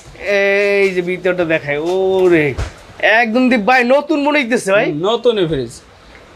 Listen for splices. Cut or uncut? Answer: uncut